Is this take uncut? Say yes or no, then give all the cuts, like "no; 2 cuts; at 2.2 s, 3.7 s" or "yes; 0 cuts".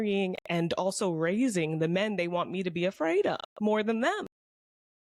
yes; 0 cuts